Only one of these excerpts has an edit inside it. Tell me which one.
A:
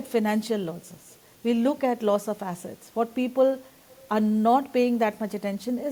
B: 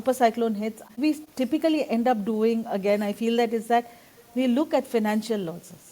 B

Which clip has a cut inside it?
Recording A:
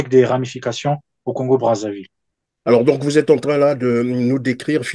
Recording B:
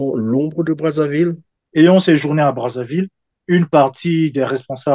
B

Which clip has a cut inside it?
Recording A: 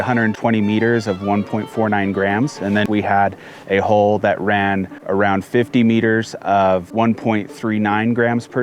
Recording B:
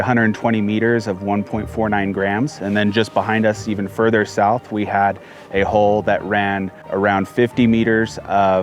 A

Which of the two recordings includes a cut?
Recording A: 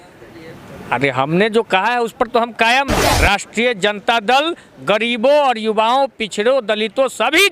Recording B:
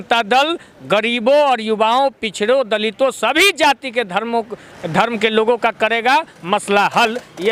A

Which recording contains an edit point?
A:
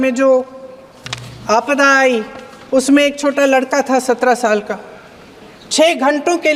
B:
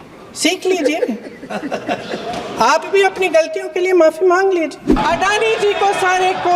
B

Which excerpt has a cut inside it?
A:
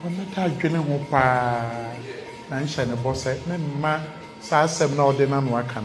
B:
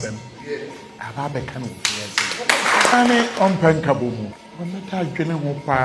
B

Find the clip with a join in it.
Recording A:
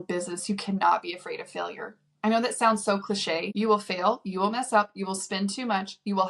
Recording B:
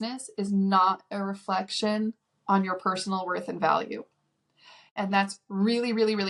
A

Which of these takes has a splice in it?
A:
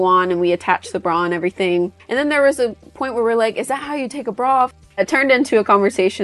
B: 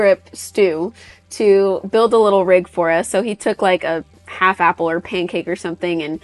A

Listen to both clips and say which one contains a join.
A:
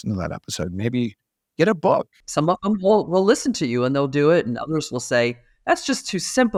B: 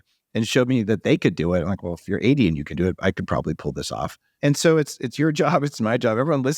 B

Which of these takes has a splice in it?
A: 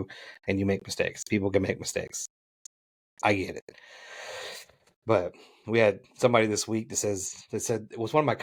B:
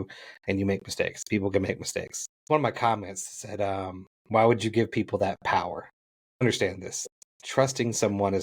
B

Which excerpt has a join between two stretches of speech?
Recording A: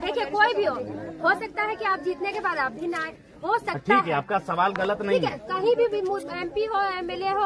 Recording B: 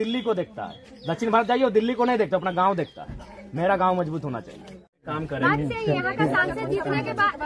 B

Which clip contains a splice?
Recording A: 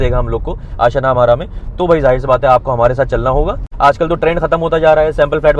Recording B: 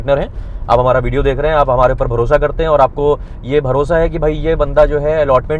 A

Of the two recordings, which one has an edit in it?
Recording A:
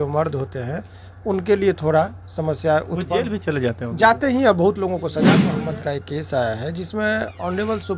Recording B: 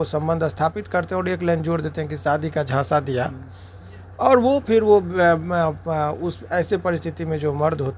A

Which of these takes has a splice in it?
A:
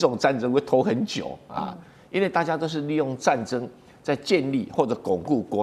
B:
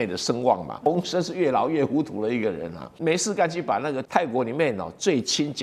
B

